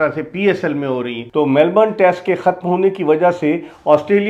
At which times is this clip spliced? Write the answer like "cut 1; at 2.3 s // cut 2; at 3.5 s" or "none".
cut 1; at 1.2 s